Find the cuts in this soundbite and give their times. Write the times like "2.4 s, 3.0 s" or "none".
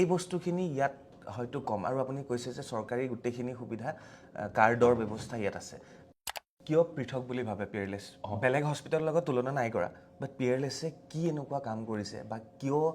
6.1 s